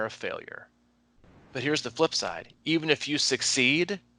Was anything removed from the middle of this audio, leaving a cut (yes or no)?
no